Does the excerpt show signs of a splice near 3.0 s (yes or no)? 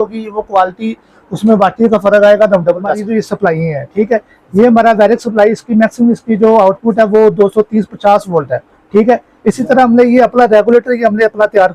yes